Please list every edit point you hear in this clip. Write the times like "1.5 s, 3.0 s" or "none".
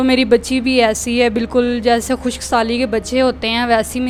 none